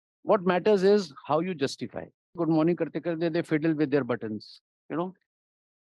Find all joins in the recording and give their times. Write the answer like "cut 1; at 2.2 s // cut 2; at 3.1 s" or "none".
cut 1; at 2.4 s

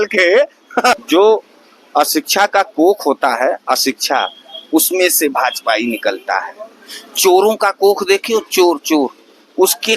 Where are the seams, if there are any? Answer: cut 1; at 1.0 s

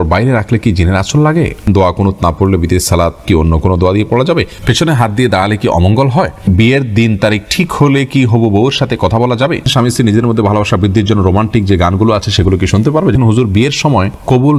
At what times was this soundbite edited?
cut 1; at 1.6 s // cut 2; at 3.2 s // cut 3; at 4.6 s // cut 4; at 6.5 s // cut 5; at 9.6 s // cut 6; at 13.1 s

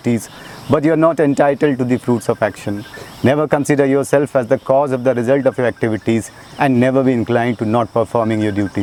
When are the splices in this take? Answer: none

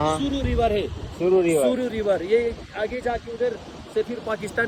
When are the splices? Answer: none

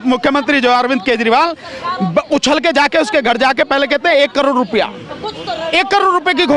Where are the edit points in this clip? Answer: none

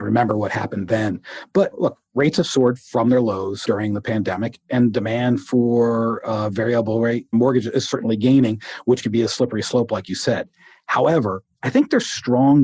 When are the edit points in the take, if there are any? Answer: none

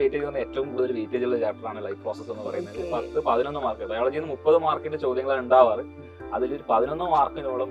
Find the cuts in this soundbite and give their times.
none

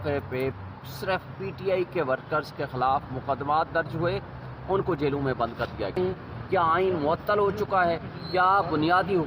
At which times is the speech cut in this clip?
cut 1; at 6.0 s

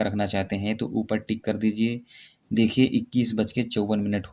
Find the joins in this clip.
none

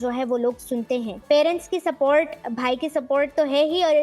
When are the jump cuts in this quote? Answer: cut 1; at 1.2 s

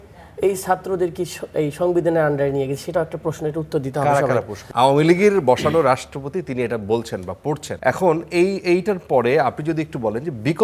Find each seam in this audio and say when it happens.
cut 1; at 4.6 s // cut 2; at 7.7 s

